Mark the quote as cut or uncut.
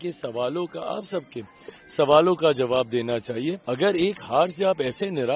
cut